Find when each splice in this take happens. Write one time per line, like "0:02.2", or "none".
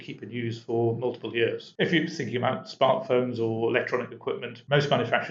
none